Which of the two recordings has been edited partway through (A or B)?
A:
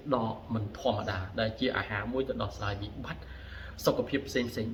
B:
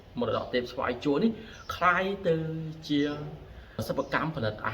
B